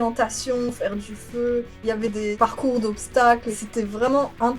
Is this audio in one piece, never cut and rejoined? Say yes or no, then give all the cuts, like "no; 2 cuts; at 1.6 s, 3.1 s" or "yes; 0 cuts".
yes; 0 cuts